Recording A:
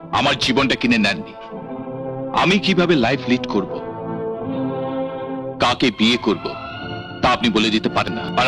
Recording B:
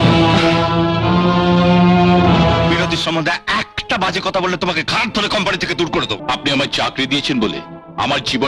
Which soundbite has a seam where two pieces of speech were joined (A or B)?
B